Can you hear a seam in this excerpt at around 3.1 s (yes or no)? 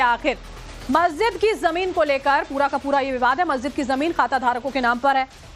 yes